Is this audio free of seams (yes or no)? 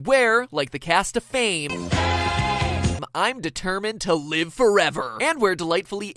no